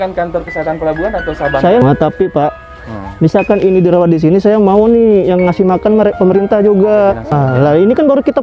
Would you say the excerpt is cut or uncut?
cut